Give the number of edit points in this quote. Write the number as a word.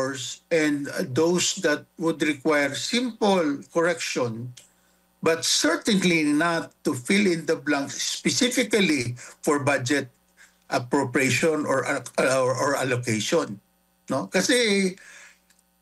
zero